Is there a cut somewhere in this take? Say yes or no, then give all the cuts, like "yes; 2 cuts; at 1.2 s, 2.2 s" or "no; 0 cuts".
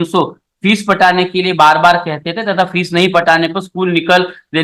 no; 0 cuts